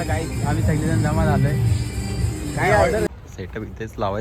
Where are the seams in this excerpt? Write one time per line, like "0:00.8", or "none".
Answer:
0:03.1

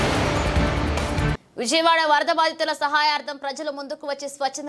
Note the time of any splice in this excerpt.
0:01.1

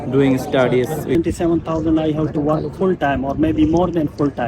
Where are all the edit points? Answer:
0:01.1

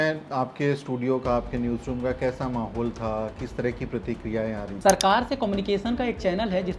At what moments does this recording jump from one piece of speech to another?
0:04.7

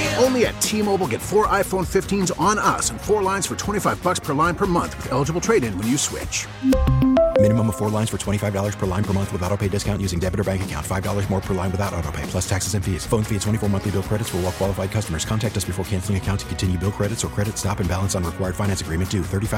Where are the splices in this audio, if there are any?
none

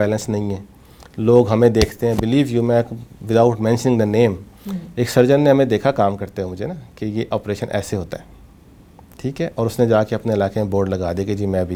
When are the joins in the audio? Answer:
none

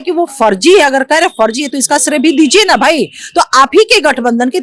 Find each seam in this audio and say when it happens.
none

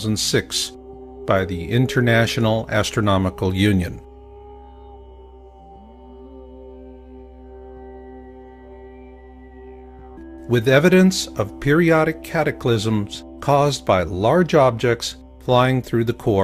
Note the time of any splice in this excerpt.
none

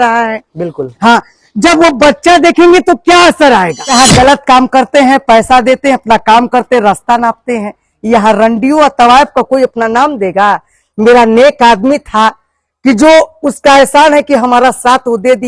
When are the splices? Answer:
0:03.9

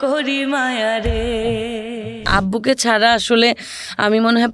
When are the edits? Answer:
0:02.3

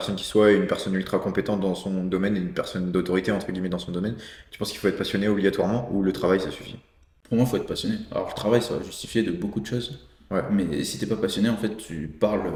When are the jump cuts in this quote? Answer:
none

